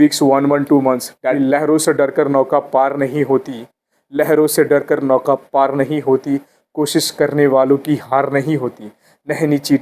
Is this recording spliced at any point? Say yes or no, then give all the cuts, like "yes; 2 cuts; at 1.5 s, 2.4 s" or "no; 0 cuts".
yes; 1 cut; at 1.4 s